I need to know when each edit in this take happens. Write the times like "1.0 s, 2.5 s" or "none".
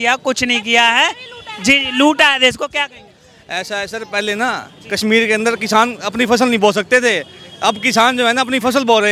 none